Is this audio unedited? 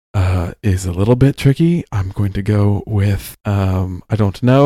no; 1 cut; at 3.3 s

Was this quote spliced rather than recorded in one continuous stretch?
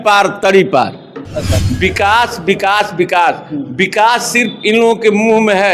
yes; 1 cut; at 1.6 s

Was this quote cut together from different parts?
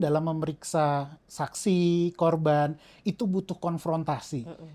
no; 0 cuts

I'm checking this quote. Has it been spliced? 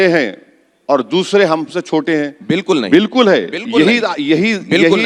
no; 0 cuts

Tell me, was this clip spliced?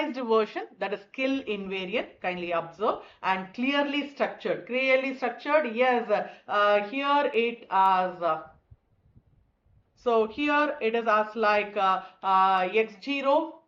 no; 0 cuts

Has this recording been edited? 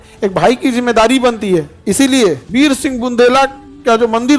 yes; 1 cut; at 2.4 s

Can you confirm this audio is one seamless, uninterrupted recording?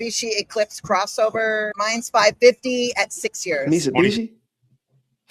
yes; 0 cuts

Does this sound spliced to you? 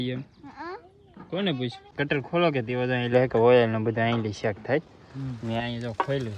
yes; 1 cut; at 1.9 s

